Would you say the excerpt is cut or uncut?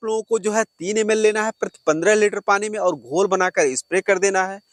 uncut